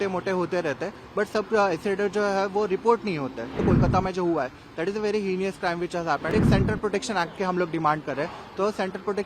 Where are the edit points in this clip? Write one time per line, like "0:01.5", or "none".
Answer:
0:03.6
0:06.3

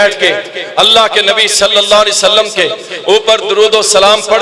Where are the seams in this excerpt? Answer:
none

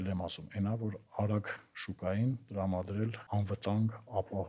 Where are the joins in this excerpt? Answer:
0:03.2

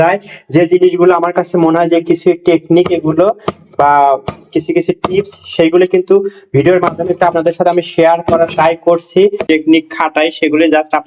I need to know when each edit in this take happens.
0:09.4

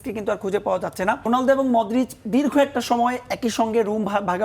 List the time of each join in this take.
0:01.3

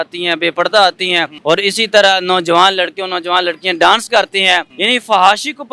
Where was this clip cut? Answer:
0:01.3
0:04.7

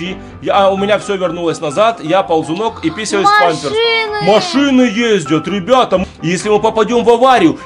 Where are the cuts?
0:06.0

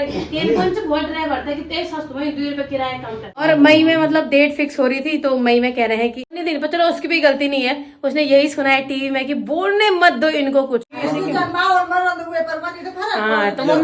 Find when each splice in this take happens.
0:03.3
0:06.4
0:10.9

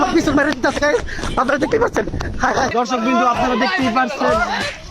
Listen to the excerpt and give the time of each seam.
0:02.7

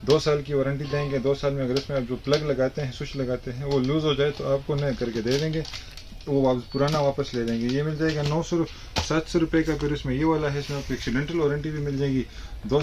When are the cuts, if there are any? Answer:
none

